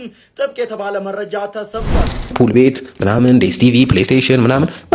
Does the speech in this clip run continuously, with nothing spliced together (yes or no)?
no